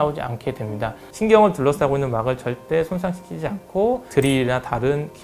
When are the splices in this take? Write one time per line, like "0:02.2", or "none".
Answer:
0:01.1

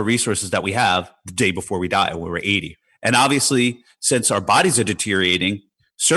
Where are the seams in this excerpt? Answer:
0:02.8

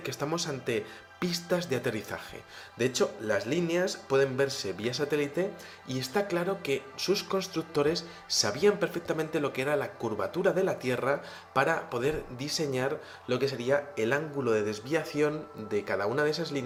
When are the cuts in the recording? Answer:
none

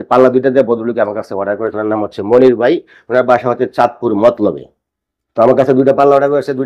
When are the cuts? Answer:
none

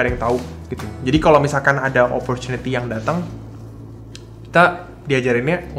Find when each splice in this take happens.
none

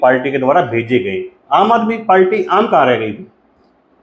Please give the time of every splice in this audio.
none

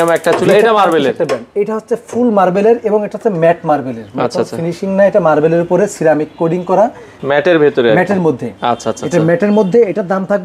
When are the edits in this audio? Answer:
none

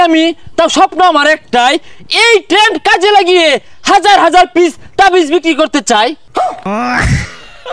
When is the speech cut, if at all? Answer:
0:06.4

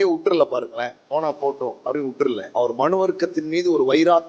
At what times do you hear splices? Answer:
0:02.4

